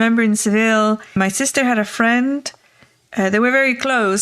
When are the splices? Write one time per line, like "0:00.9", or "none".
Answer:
0:01.1